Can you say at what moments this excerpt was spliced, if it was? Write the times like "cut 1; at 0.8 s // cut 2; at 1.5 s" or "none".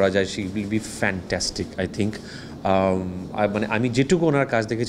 none